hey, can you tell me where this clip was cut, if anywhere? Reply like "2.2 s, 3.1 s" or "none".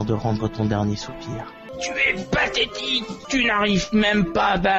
1.7 s, 3.1 s